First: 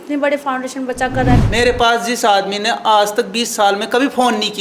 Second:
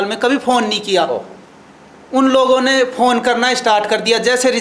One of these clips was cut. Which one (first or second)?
first